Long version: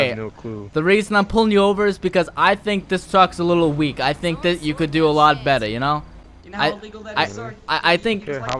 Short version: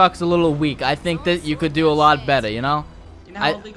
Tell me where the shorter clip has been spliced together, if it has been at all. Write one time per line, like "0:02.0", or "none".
none